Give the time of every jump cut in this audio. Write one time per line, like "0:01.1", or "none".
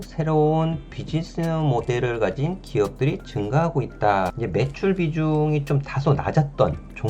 0:04.3